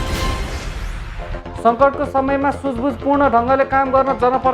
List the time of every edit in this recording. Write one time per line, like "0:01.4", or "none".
0:00.9